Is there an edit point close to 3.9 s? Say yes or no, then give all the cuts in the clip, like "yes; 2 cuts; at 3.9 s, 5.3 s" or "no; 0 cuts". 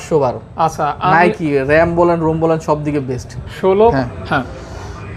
yes; 1 cut; at 3.9 s